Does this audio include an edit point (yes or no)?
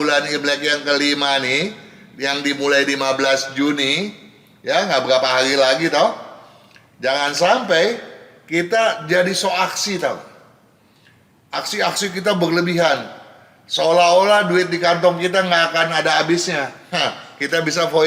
no